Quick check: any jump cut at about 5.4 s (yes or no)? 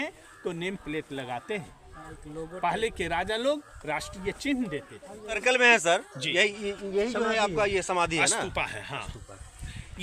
yes